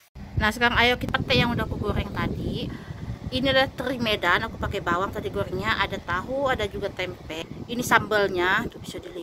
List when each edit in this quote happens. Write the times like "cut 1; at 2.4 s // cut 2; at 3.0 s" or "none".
cut 1; at 1.0 s